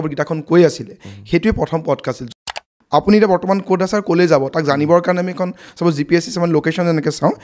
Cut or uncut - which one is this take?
cut